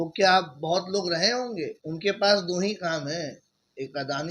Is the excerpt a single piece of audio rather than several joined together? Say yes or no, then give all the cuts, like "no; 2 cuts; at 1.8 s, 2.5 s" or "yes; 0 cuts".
no; 1 cut; at 1.8 s